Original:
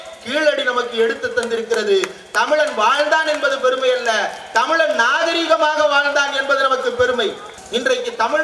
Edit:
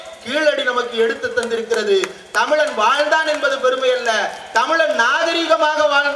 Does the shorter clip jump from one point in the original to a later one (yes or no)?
no